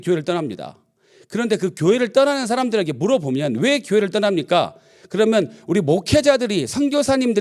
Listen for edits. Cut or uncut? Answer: uncut